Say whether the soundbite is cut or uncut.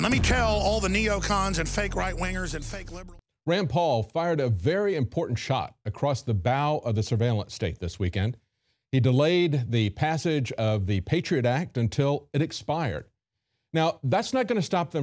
cut